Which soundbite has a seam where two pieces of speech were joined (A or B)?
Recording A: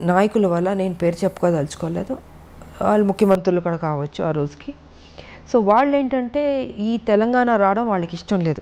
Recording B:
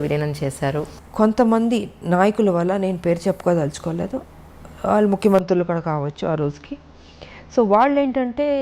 B